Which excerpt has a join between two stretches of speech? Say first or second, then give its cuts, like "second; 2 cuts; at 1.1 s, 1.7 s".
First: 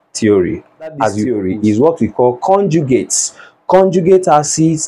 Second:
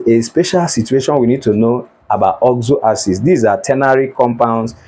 first; 1 cut; at 1.3 s